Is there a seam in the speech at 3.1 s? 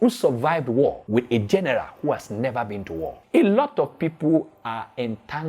yes; 2 cuts; at 1.0 s, 3.1 s

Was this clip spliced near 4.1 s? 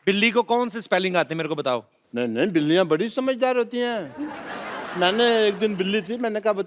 no; 1 cut; at 2.0 s

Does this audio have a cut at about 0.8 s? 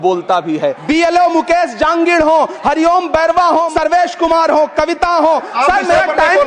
yes; 3 cuts; at 0.8 s, 3.7 s, 5.5 s

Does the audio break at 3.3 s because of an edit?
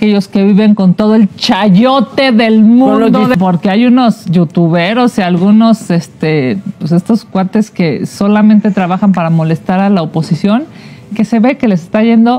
yes; 1 cut; at 3.3 s

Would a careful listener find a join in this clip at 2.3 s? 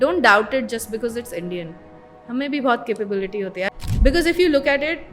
no; 1 cut; at 3.7 s

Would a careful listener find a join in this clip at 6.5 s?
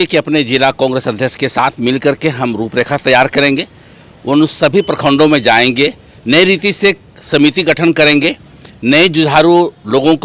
no; 0 cuts

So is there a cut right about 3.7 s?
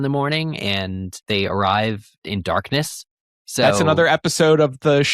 no; 2 cuts; at 1.2 s, 2.2 s

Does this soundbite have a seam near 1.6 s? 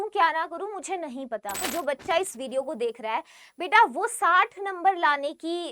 yes; 1 cut; at 1.6 s

